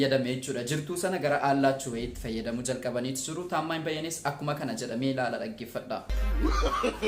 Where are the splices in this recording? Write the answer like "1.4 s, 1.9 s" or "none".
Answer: 6.2 s